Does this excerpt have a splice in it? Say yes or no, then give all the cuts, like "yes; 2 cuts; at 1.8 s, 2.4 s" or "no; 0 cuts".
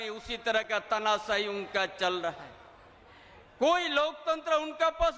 no; 0 cuts